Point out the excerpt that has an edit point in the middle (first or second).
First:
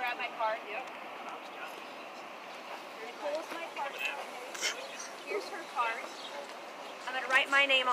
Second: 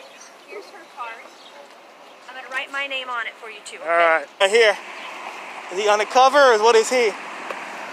second